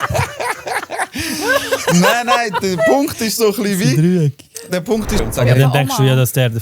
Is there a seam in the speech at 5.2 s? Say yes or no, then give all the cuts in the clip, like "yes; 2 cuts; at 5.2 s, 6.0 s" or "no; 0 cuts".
yes; 1 cut; at 5.2 s